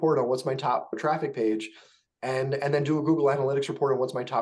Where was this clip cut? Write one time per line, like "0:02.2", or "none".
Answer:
0:01.0